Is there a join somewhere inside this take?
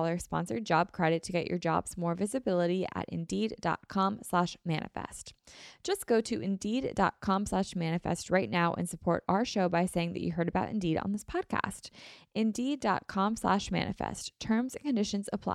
no; 0 cuts

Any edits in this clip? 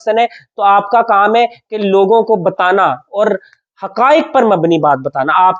no; 0 cuts

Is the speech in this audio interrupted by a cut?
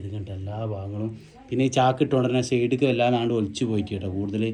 no; 0 cuts

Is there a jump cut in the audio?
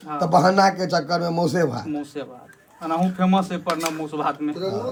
no; 0 cuts

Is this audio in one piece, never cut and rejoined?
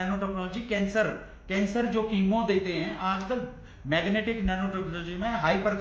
yes; 0 cuts

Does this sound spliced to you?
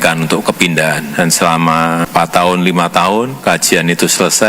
yes; 3 cuts; at 1.0 s, 2.1 s, 3.3 s

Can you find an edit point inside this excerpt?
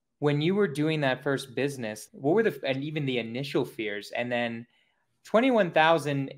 no; 0 cuts

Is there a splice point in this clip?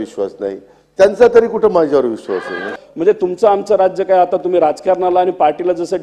yes; 1 cut; at 2.8 s

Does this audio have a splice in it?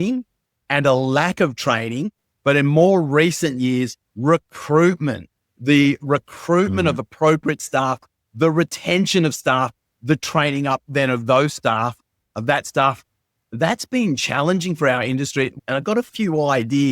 yes; 2 cuts; at 2.2 s, 15.6 s

